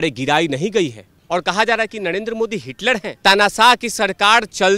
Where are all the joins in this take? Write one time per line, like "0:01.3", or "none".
0:01.1
0:03.1